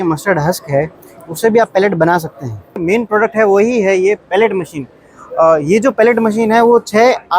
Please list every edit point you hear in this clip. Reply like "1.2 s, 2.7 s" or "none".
2.8 s